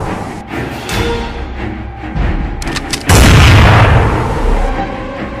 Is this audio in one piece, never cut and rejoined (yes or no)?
yes